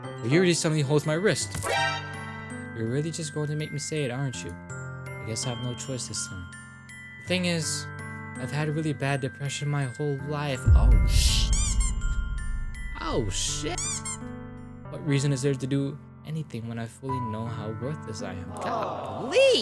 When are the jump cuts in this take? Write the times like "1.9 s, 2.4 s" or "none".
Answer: 2.1 s, 14.8 s